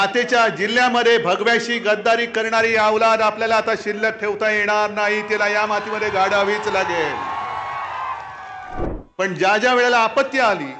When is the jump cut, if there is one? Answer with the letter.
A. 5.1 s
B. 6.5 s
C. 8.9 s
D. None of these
C